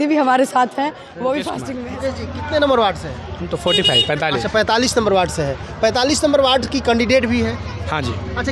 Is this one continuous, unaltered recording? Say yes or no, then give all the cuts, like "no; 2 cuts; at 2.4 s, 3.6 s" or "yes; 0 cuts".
no; 1 cut; at 1.6 s